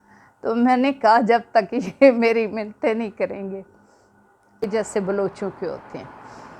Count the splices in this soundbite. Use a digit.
1